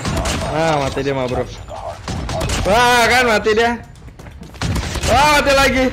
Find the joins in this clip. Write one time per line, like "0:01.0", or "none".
none